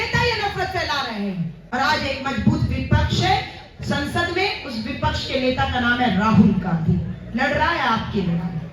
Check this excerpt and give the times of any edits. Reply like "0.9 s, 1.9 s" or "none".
1.6 s